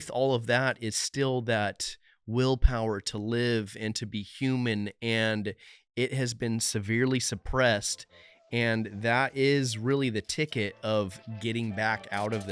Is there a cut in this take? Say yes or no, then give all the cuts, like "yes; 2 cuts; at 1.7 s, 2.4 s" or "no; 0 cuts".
no; 0 cuts